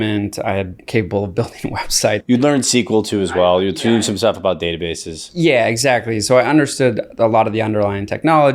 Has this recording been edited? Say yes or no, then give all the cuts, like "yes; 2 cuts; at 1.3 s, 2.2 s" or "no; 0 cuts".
yes; 1 cut; at 2.2 s